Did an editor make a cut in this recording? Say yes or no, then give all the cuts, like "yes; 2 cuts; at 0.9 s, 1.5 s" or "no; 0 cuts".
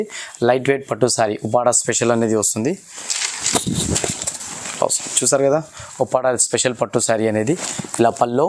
no; 0 cuts